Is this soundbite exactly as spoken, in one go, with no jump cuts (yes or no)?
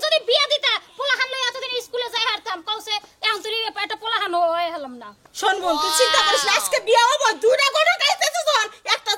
yes